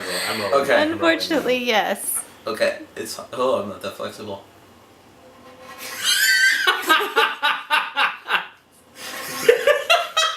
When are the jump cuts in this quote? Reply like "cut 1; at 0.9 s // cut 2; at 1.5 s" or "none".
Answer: cut 1; at 2.5 s